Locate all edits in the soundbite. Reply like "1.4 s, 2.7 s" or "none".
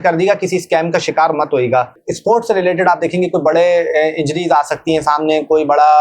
2.1 s

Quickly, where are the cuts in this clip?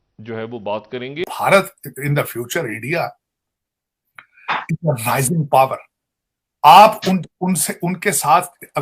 1.3 s

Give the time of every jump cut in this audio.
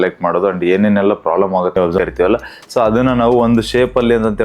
2.0 s

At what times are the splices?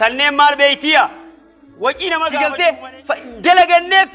2.3 s

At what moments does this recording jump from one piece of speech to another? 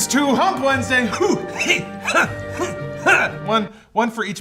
none

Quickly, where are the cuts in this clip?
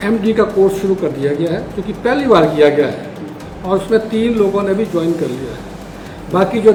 none

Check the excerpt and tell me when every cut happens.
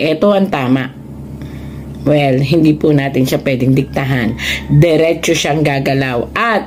none

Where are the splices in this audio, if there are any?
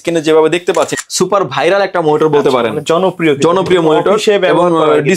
0.9 s

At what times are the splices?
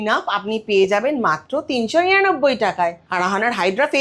3.0 s

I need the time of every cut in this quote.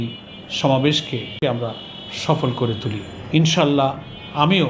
1.4 s, 3.1 s

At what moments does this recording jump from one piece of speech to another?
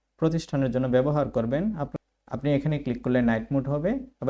1.9 s

